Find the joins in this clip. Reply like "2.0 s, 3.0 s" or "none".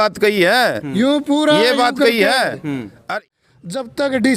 3.3 s